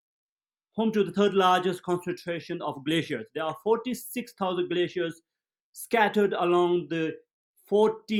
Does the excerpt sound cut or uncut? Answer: uncut